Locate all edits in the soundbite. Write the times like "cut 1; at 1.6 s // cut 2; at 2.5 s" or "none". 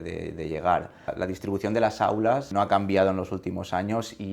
cut 1; at 1.1 s // cut 2; at 2.5 s